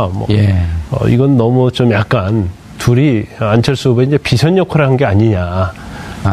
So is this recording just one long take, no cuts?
yes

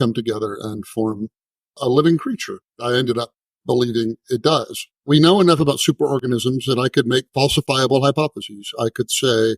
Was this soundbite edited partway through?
yes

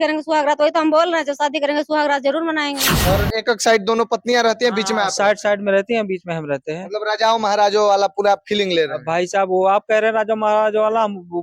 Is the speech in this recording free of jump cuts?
no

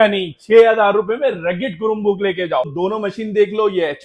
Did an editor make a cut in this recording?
yes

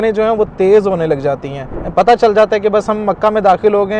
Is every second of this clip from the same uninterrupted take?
yes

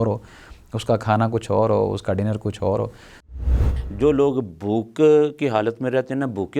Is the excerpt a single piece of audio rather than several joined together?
no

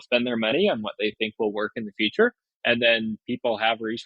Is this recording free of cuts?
no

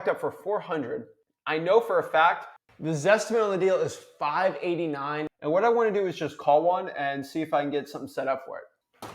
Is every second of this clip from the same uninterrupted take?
no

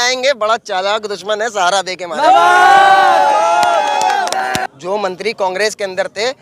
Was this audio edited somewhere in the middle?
yes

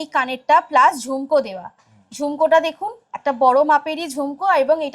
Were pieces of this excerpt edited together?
no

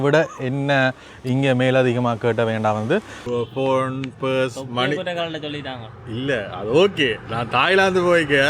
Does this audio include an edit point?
yes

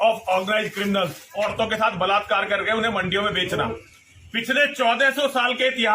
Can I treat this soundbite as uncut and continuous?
no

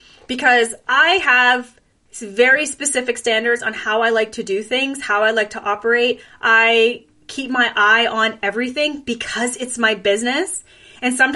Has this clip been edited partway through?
no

